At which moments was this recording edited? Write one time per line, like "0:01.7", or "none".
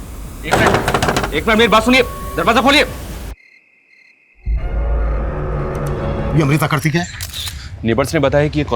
0:06.2